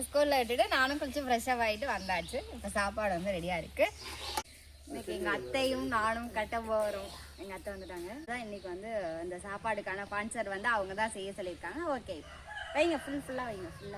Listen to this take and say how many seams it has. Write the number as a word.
two